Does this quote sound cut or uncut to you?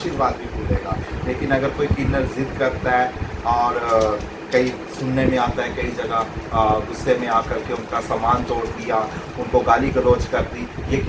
uncut